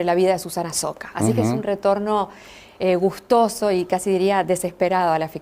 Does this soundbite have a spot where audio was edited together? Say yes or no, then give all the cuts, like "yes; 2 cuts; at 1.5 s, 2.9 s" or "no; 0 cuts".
yes; 1 cut; at 4.0 s